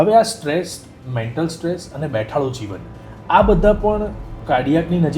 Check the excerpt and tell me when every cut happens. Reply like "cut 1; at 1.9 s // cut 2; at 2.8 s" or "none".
cut 1; at 4.3 s

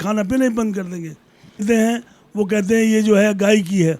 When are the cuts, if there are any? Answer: cut 1; at 1.6 s

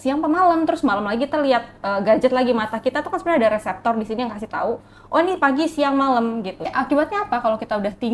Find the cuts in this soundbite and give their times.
cut 1; at 6.7 s

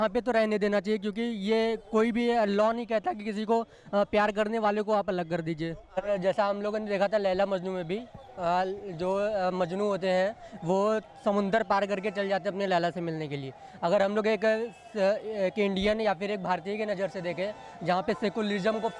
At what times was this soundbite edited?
cut 1; at 5.9 s

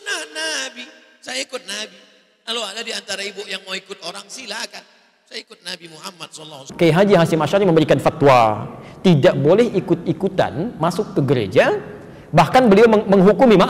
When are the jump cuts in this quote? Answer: cut 1; at 6.6 s

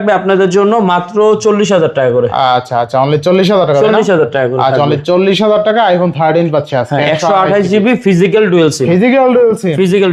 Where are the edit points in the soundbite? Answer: none

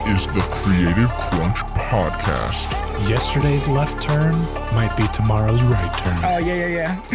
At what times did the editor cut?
none

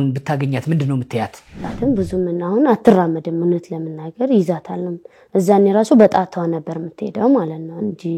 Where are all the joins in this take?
cut 1; at 1.6 s

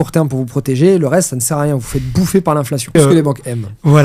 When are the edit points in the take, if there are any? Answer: cut 1; at 3.0 s

